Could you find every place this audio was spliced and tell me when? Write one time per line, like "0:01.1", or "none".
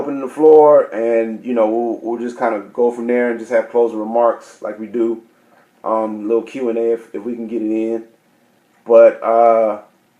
0:01.4